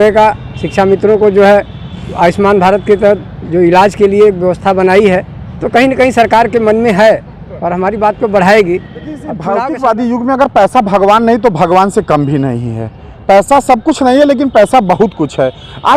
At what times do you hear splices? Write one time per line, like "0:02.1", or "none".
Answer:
0:09.3